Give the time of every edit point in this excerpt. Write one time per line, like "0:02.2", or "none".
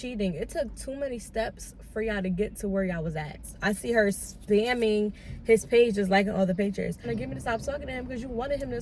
0:03.5
0:07.0